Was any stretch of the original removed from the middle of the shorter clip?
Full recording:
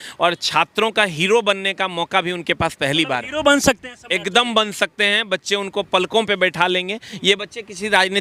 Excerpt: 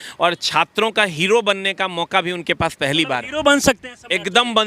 no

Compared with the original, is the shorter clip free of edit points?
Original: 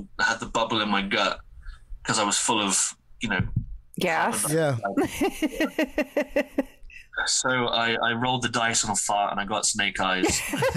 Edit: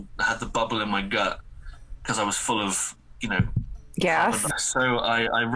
no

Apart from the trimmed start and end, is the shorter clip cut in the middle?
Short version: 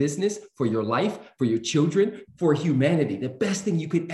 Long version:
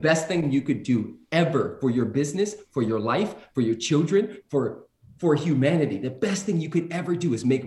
yes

